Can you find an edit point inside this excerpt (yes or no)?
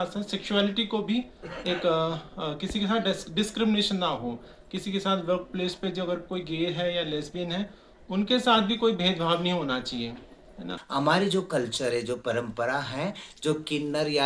yes